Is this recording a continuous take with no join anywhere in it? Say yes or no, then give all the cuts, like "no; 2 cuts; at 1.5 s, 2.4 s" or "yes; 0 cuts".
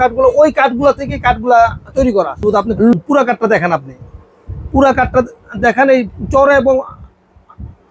no; 1 cut; at 2.9 s